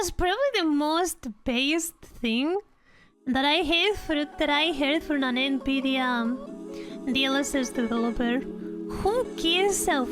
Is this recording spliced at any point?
yes; 1 cut; at 8.6 s

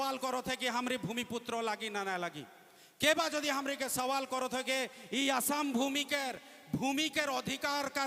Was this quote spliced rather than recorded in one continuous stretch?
no; 0 cuts

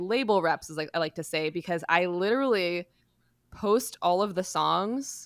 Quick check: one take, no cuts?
yes; 0 cuts

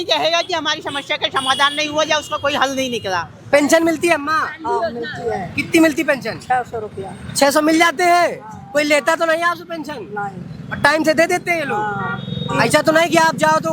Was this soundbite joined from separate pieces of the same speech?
yes; 1 cut; at 3.4 s

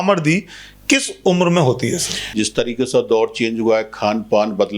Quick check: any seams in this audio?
yes; 1 cut; at 2.4 s

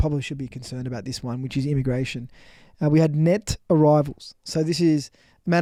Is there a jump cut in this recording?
no; 0 cuts

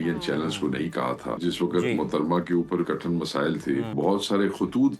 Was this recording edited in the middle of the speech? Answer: yes; 3 cuts; at 1.4 s, 2.9 s, 3.9 s

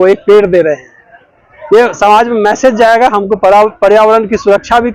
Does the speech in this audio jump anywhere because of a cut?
no; 0 cuts

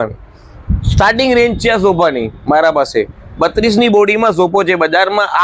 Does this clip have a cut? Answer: no; 0 cuts

